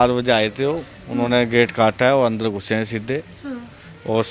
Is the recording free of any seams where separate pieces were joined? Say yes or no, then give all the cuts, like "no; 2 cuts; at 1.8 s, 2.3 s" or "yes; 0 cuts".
yes; 0 cuts